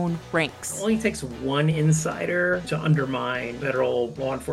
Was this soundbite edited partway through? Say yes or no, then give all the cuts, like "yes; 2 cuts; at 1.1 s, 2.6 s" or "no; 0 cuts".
yes; 1 cut; at 2.6 s